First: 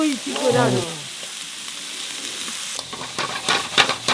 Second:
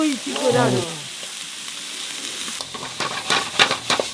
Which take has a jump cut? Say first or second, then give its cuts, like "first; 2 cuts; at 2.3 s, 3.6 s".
second; 1 cut; at 2.6 s